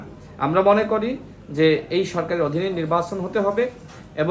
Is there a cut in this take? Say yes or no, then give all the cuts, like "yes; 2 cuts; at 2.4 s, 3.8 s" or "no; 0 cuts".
no; 0 cuts